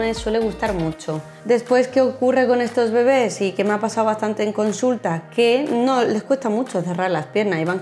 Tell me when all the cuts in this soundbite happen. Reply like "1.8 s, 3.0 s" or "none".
1.3 s